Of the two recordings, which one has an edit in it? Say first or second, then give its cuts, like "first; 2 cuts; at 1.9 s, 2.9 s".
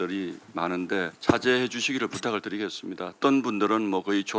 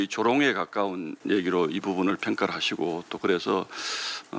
first; 2 cuts; at 1.1 s, 3.1 s